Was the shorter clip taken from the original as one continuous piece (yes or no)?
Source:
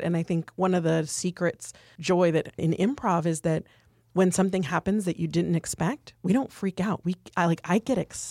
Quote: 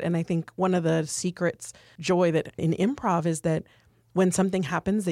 yes